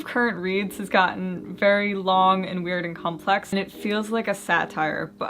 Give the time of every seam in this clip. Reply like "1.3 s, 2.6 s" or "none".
3.5 s